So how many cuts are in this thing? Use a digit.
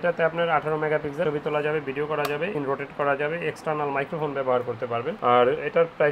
0